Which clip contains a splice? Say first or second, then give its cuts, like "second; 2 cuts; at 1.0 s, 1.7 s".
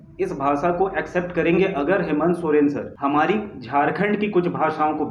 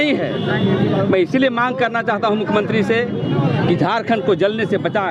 first; 1 cut; at 2.9 s